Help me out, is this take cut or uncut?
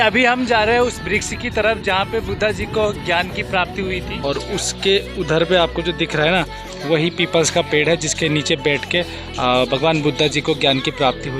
cut